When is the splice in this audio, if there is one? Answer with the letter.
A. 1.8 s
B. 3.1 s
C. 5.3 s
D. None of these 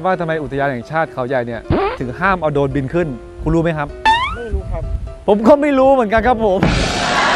D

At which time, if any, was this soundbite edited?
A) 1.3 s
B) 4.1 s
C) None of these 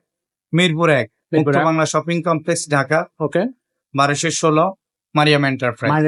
C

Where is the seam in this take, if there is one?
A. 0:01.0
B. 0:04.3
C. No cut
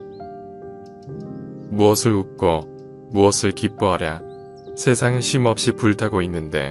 A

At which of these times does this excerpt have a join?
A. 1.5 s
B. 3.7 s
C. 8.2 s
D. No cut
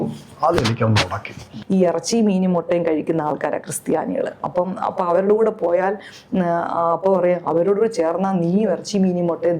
A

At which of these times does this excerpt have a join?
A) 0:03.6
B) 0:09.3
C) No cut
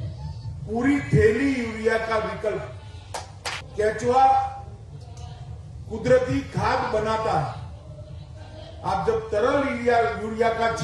A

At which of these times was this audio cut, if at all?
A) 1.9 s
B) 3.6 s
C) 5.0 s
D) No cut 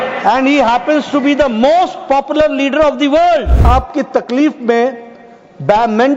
B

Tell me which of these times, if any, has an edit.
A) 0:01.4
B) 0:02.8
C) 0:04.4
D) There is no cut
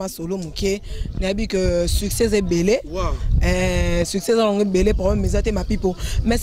D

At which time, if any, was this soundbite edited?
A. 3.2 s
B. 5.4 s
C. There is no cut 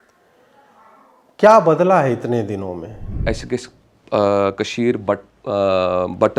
A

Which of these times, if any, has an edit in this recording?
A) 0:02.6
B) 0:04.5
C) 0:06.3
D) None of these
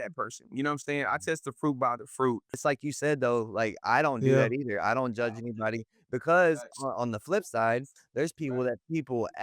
A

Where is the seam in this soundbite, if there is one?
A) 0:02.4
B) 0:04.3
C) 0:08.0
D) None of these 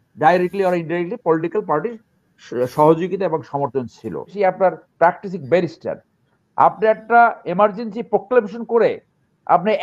B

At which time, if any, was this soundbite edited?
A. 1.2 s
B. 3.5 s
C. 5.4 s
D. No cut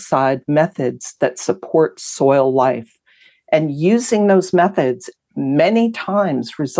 D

